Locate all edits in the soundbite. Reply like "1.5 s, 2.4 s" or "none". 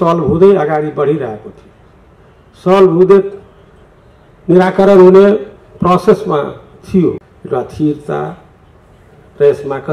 7.2 s